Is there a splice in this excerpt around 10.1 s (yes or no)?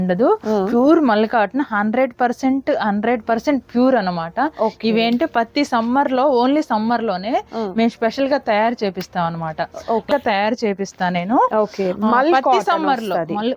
yes